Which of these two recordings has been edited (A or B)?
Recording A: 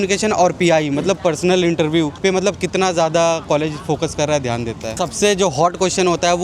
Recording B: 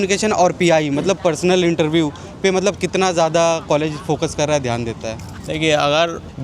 A